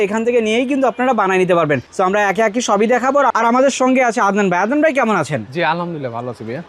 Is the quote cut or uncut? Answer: uncut